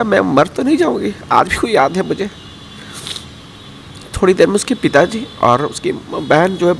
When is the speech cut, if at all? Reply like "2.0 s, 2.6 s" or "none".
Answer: none